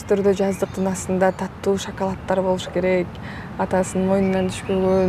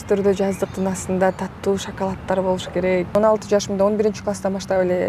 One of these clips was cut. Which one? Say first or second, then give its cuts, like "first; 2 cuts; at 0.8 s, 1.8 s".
second; 1 cut; at 3.2 s